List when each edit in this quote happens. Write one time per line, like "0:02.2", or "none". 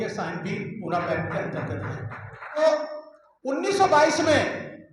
0:02.6